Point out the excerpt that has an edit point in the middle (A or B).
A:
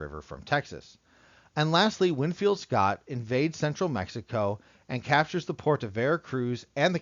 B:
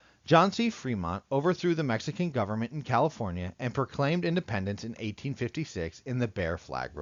A